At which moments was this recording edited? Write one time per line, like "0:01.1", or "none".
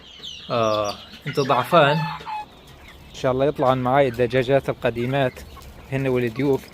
0:02.3